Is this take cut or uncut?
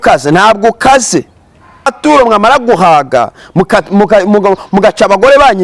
cut